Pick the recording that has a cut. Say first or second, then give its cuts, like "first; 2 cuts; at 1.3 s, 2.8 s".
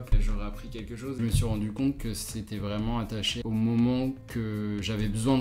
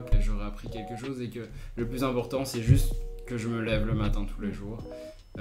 first; 3 cuts; at 1.2 s, 3.4 s, 4.3 s